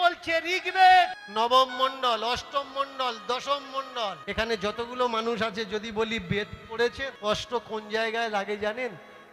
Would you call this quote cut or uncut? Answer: cut